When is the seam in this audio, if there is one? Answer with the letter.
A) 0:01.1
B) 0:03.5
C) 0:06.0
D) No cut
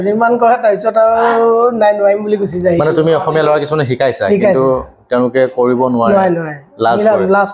D